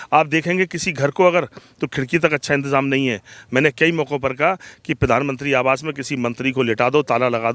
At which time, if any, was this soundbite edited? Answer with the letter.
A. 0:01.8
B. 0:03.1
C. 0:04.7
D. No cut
D